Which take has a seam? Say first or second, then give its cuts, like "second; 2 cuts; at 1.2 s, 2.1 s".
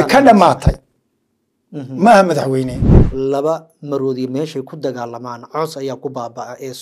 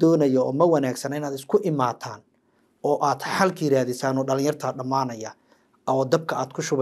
first; 1 cut; at 3.0 s